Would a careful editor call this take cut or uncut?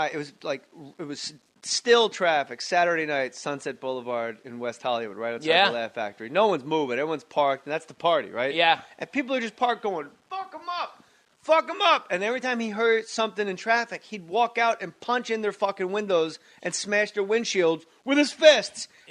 uncut